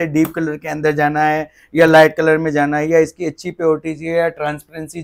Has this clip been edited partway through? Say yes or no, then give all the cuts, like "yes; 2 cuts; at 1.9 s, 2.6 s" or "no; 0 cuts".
no; 0 cuts